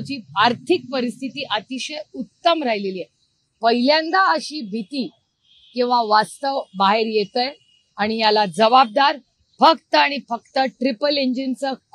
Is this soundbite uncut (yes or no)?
yes